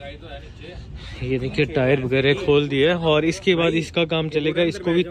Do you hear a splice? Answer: no; 0 cuts

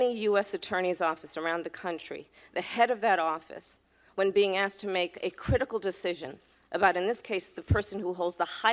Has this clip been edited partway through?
no; 0 cuts

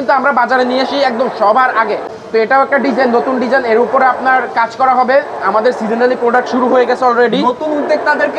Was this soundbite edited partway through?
no; 0 cuts

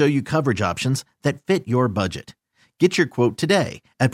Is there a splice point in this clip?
no; 0 cuts

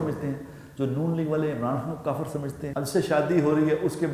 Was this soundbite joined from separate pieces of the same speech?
yes; 1 cut; at 2.6 s

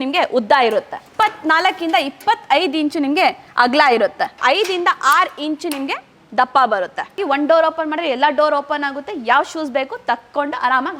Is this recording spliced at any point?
yes; 3 cuts; at 1.0 s, 4.4 s, 7.2 s

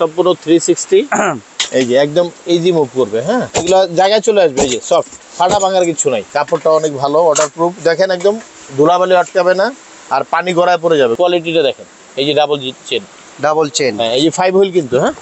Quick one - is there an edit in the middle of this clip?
yes; 3 cuts; at 3.5 s, 6.3 s, 11.1 s

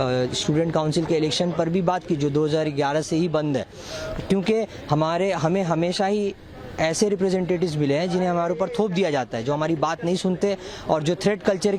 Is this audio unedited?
yes; 0 cuts

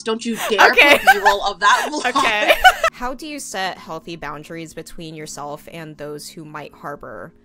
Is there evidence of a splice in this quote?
yes; 1 cut; at 2.9 s

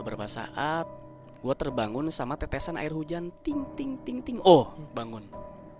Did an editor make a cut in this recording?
no; 0 cuts

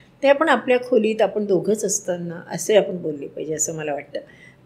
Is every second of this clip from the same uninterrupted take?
yes; 0 cuts

